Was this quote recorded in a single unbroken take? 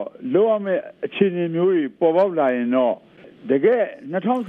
no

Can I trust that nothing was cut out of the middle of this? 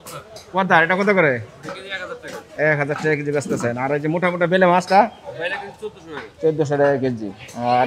yes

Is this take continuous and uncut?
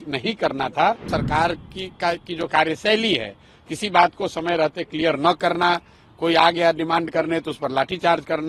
no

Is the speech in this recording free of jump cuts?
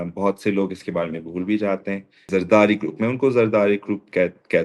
no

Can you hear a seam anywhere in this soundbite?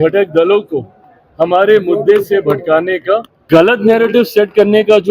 yes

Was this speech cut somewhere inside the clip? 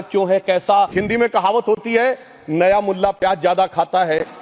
yes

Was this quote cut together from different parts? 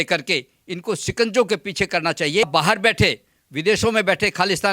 yes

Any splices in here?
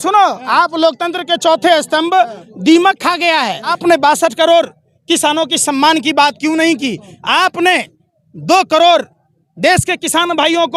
yes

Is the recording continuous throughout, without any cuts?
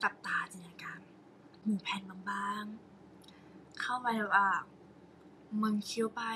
no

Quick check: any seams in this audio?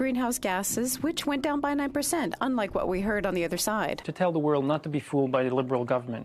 yes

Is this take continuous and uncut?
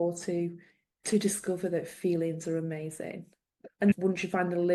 yes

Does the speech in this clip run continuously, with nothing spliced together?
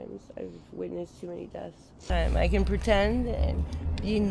no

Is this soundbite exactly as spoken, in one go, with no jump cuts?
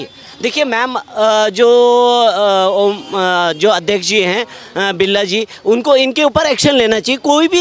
yes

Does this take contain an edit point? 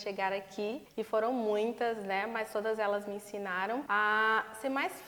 yes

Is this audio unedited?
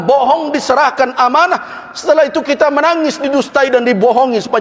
yes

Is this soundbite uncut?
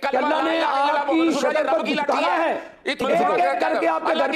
no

